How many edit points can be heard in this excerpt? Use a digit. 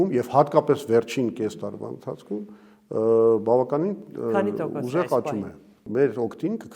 1